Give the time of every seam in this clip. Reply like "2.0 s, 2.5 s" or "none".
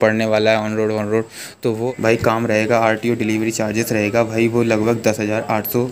1.9 s